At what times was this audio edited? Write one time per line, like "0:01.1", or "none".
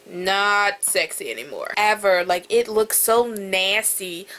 0:01.7